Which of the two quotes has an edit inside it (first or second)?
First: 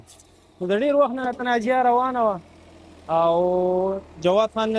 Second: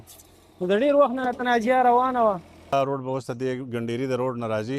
second